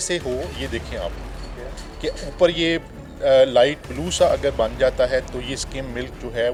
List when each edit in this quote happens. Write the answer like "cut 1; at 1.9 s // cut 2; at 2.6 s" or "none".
none